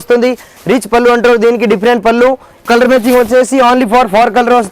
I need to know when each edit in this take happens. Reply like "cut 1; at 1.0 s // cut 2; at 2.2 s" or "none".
cut 1; at 2.6 s